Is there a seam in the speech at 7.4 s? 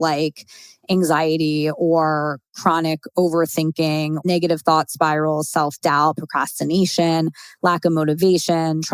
no; 1 cut; at 4.2 s

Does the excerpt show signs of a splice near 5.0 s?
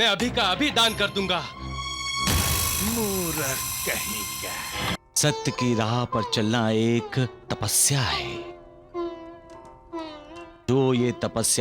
yes; 1 cut; at 5.0 s

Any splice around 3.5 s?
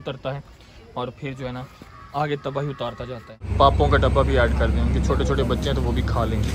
yes; 1 cut; at 3.5 s

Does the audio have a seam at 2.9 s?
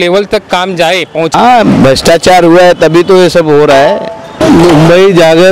no; 2 cuts; at 1.3 s, 4.4 s

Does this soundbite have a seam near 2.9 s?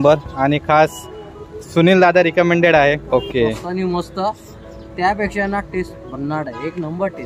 yes; 1 cut; at 2.9 s

